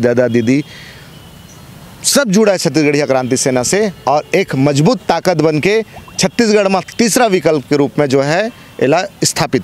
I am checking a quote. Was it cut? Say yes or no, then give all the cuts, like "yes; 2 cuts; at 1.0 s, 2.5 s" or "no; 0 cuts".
no; 0 cuts